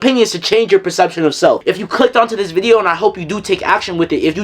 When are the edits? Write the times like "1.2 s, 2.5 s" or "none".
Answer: 1.6 s